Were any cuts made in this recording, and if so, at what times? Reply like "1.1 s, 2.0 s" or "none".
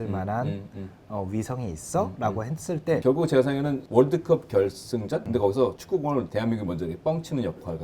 3.0 s